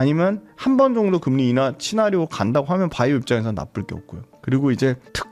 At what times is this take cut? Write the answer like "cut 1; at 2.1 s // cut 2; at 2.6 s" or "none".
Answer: none